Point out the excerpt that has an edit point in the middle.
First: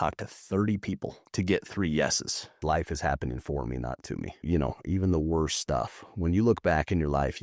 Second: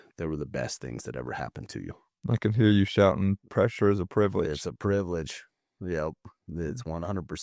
first; 3 cuts; at 1.2 s, 2.6 s, 4.4 s

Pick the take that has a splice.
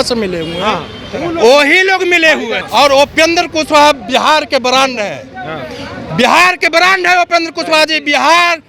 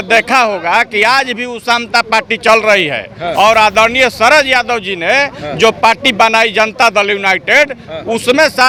first; 1 cut; at 2.6 s

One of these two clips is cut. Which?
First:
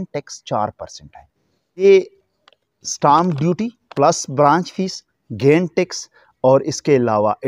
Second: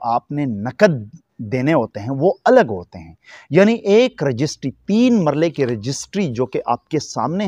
first; 1 cut; at 1.8 s

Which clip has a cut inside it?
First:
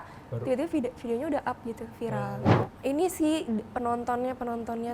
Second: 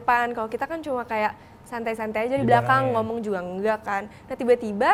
first; 1 cut; at 2.6 s

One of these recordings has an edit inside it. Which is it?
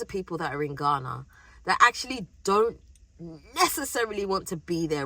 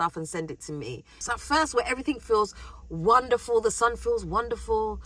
second; 1 cut; at 1.1 s

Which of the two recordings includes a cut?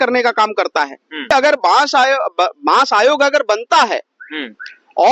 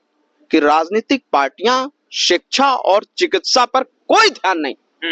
first; 1 cut; at 1.3 s

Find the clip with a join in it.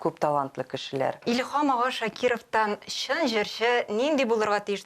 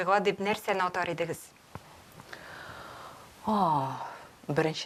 first; 1 cut; at 1.2 s

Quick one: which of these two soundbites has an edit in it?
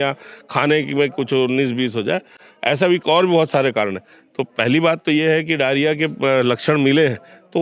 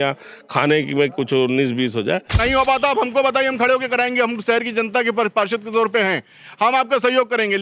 second; 1 cut; at 2.4 s

